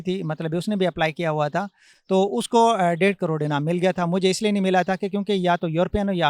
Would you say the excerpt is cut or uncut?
uncut